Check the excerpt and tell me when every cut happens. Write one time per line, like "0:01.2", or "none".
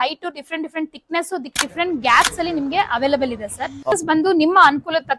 0:03.9